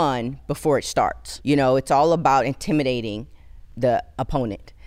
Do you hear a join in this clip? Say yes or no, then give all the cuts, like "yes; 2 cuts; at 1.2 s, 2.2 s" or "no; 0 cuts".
yes; 2 cuts; at 1.2 s, 3.7 s